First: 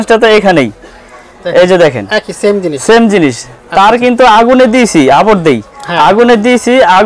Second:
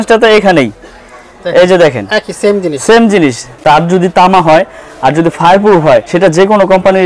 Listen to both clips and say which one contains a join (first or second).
second